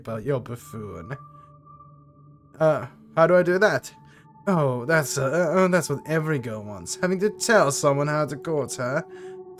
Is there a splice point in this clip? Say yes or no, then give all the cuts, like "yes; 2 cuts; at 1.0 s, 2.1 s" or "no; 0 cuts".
no; 0 cuts